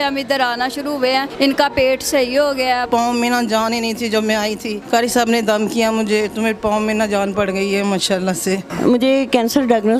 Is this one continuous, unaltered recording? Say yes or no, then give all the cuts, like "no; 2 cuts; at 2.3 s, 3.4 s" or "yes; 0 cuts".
no; 4 cuts; at 1.3 s, 2.9 s, 4.7 s, 8.7 s